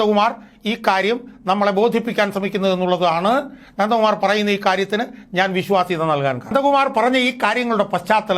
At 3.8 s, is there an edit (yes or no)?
no